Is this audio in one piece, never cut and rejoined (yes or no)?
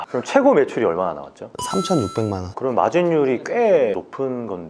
no